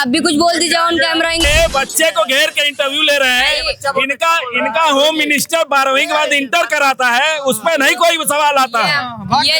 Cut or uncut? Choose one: cut